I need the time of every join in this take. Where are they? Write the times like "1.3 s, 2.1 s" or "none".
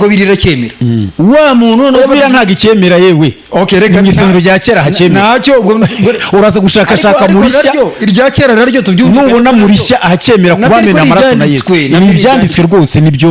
none